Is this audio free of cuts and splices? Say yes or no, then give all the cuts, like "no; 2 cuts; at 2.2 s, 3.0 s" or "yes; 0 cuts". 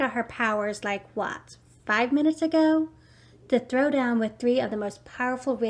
yes; 0 cuts